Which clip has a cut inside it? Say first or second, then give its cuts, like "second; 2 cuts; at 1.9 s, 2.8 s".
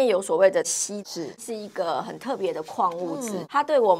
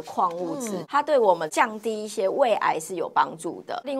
first; 1 cut; at 1.1 s